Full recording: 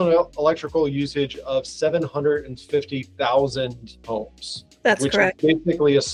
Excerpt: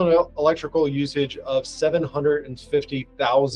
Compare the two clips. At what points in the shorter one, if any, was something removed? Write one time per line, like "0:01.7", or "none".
none